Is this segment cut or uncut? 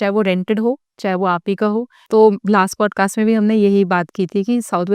cut